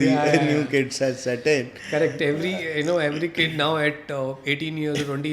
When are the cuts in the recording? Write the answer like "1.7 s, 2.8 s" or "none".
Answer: none

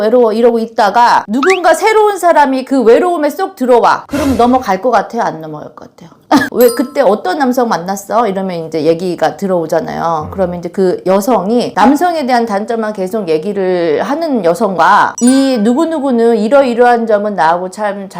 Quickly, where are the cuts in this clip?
6.5 s

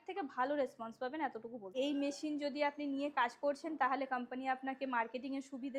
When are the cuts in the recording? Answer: 1.7 s

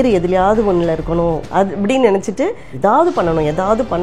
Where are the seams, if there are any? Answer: 2.7 s

